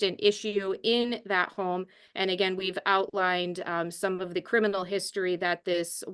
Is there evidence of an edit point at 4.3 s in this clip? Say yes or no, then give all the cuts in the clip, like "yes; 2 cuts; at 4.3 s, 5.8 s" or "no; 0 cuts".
no; 0 cuts